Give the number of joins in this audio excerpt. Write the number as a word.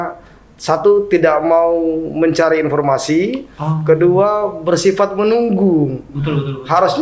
zero